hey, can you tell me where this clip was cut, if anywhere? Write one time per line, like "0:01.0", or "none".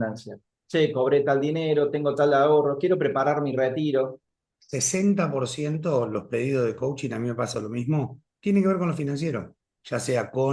none